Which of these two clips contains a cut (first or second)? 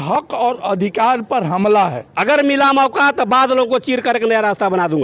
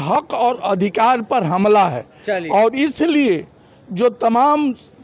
first